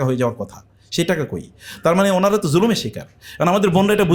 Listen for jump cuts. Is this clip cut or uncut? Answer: uncut